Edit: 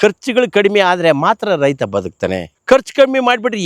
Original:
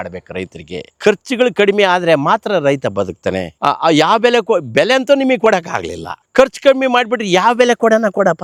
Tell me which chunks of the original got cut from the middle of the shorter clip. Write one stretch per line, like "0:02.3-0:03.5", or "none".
0:03.5-0:06.1